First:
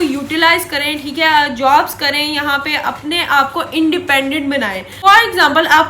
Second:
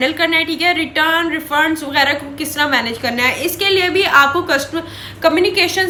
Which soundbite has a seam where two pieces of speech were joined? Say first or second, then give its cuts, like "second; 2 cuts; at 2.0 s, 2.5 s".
first; 1 cut; at 4.9 s